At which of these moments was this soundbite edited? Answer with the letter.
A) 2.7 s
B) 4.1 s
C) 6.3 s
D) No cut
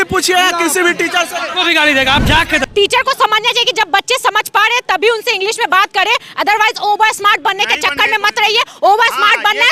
A